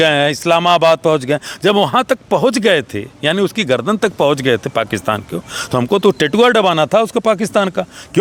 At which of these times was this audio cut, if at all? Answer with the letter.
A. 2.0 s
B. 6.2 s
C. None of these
C